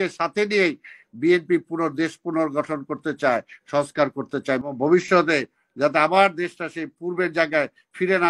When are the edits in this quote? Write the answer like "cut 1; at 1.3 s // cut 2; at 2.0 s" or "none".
cut 1; at 4.6 s